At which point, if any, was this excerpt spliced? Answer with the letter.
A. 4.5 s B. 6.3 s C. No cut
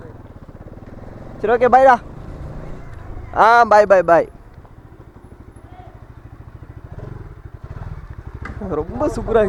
C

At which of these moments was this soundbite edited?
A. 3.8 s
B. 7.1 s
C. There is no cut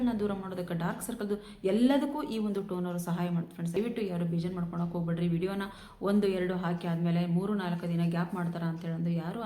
A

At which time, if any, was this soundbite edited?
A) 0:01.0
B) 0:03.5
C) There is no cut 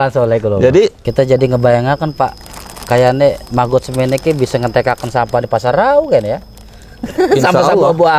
A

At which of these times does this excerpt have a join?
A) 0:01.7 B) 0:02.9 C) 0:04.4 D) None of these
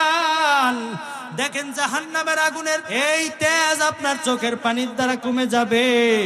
B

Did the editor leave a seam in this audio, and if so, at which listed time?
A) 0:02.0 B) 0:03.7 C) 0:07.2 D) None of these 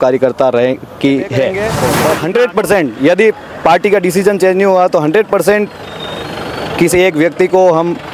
A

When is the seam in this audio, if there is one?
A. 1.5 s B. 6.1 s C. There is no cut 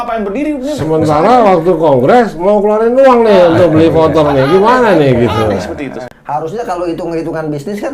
B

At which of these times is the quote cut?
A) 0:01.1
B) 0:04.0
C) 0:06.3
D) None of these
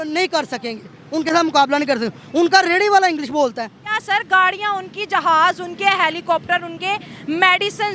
B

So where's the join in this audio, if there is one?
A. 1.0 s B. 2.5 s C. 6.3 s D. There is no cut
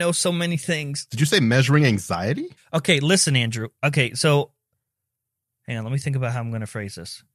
A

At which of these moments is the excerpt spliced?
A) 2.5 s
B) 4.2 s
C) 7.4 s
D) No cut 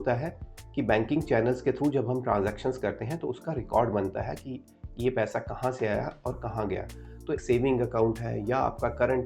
C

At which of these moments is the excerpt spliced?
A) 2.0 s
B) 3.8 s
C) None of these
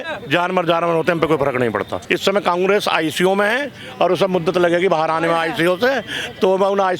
A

